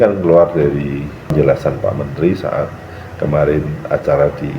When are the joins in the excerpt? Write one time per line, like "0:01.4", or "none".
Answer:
0:01.3